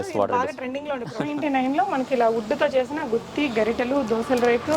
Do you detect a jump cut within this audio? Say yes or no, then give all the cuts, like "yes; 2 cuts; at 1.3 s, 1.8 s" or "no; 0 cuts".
yes; 1 cut; at 1.1 s